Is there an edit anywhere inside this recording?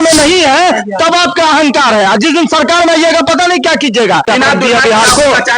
yes; 1 cut; at 4.3 s

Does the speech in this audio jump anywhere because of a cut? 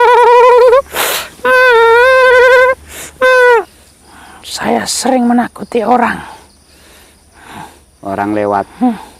yes; 1 cut; at 3.6 s

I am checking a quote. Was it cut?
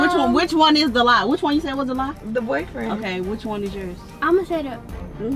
no; 0 cuts

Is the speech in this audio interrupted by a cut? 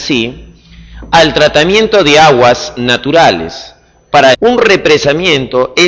no; 0 cuts

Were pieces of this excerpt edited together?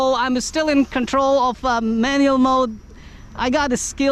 no; 0 cuts

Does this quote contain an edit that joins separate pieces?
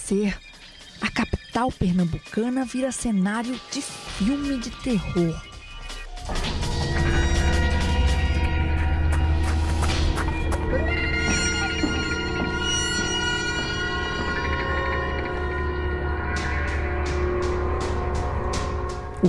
no; 0 cuts

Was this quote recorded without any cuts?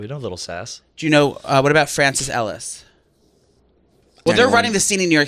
no; 1 cut; at 4.3 s

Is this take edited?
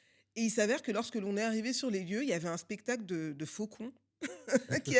no; 0 cuts

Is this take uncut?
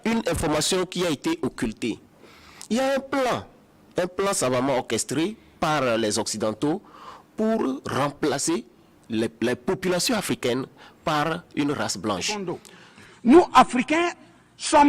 no; 1 cut; at 12.9 s

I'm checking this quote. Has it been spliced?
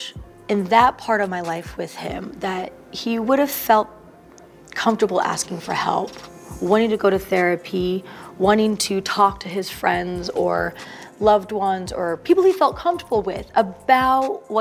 no; 0 cuts

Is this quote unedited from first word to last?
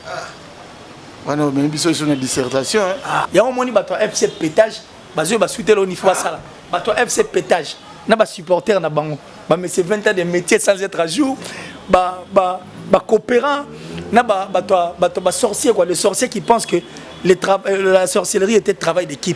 no; 1 cut; at 3.3 s

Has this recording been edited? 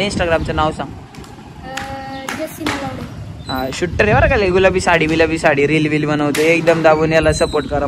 no; 0 cuts

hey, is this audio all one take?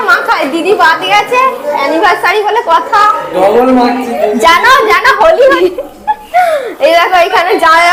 yes; 0 cuts

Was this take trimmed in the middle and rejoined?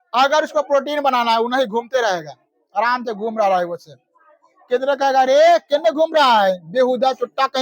no; 0 cuts

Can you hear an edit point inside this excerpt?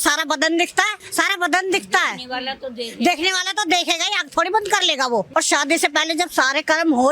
yes; 2 cuts; at 1.0 s, 5.3 s

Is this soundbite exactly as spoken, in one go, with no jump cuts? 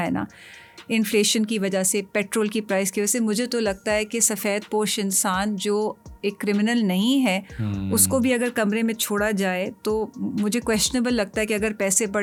yes; 0 cuts

